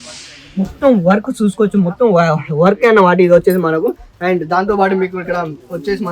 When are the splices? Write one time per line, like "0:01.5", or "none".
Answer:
none